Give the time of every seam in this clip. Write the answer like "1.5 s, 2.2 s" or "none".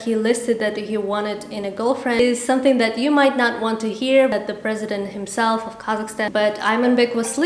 2.2 s, 4.3 s, 6.2 s